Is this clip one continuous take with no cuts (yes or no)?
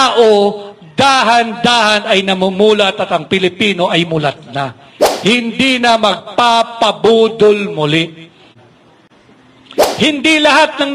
no